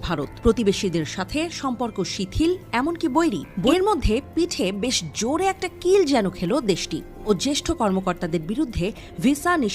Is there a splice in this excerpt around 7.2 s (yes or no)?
yes